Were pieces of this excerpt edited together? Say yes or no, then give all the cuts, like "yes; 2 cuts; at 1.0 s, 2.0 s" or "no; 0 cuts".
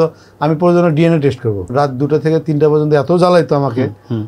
yes; 1 cut; at 1.7 s